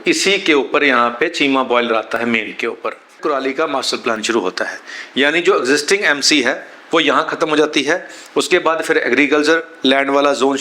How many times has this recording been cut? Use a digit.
1